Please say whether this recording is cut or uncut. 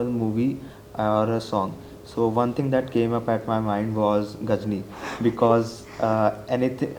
uncut